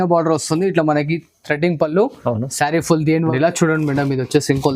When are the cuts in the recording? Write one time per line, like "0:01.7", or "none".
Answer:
0:03.1